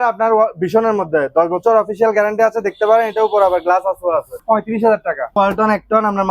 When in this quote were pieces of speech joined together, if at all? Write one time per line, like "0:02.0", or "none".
0:04.4
0:05.4